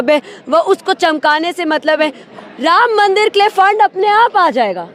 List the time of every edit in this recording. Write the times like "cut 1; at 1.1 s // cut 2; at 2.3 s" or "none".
cut 1; at 2.2 s

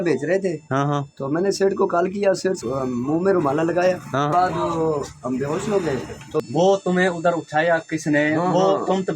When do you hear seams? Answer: cut 1; at 2.6 s // cut 2; at 4.3 s // cut 3; at 6.4 s

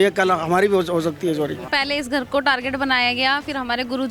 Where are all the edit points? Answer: cut 1; at 1.6 s

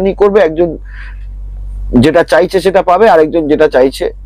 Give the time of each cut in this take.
none

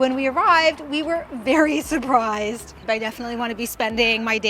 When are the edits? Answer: cut 1; at 2.8 s

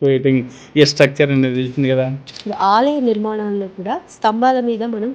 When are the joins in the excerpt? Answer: cut 1; at 2.4 s

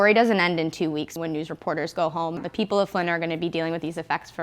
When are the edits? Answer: cut 1; at 1.1 s // cut 2; at 2.4 s

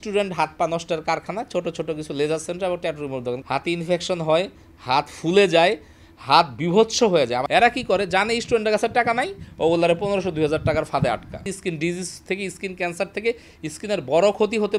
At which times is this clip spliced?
cut 1; at 3.4 s // cut 2; at 7.4 s // cut 3; at 11.5 s

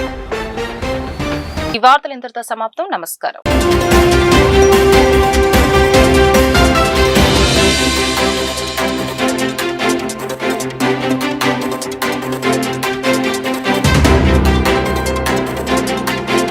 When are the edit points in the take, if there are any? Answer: none

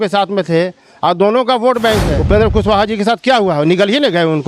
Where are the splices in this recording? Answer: cut 1; at 2.1 s

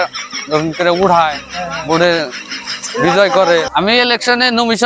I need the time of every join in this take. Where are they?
cut 1; at 3.7 s

